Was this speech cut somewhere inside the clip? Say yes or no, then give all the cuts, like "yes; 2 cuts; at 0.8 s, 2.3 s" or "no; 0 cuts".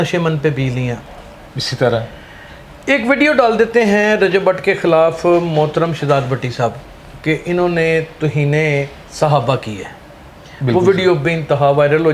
no; 0 cuts